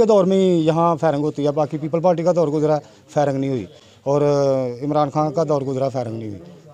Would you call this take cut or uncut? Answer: uncut